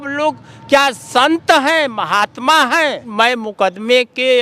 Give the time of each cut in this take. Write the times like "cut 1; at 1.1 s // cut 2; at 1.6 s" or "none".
cut 1; at 3.0 s